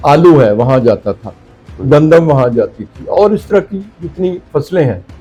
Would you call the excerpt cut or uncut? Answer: uncut